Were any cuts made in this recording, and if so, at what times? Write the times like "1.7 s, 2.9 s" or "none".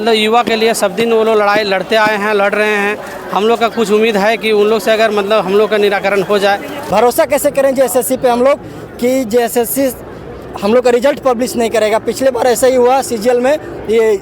6.7 s